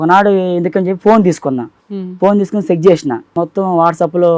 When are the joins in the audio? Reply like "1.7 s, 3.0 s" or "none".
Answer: 1.7 s, 3.3 s

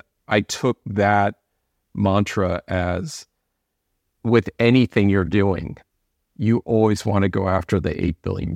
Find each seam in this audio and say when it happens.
none

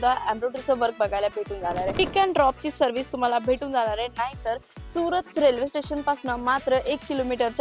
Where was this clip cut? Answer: 2.0 s

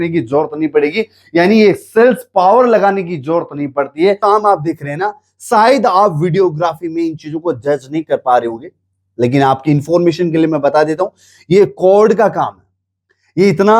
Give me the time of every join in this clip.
4.2 s

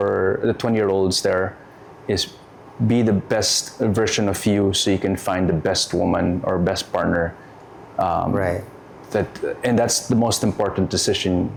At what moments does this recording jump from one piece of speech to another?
none

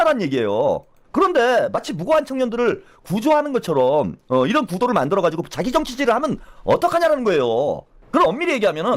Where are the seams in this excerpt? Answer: 0.9 s, 7.9 s

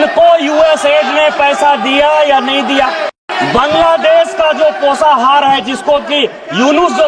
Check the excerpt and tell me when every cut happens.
3.2 s

